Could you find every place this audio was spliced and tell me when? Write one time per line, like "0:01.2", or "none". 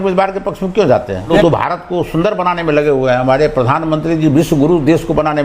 0:01.4

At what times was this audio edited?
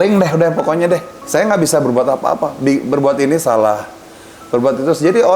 0:01.2

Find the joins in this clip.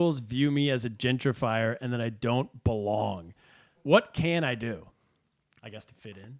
0:03.8

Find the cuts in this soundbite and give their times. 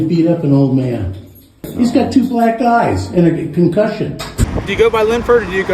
0:01.6
0:04.5

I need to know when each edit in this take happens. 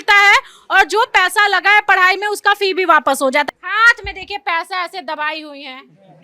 0:03.5

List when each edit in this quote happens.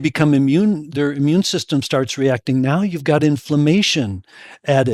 none

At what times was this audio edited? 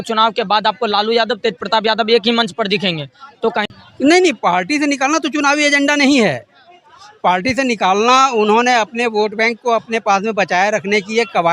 0:03.7

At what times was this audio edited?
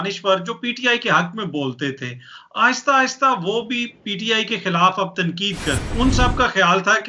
0:05.9

